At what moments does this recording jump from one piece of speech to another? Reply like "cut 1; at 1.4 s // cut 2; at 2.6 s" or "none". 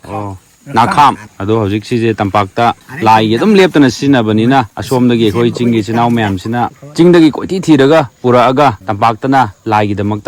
cut 1; at 1.3 s // cut 2; at 2.9 s // cut 3; at 4.8 s // cut 4; at 6.8 s // cut 5; at 8.9 s